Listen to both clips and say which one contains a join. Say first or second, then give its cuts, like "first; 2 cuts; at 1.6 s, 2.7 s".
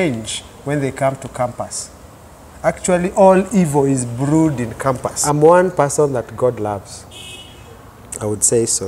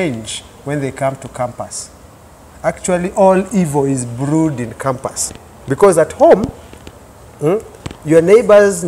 first; 1 cut; at 5.1 s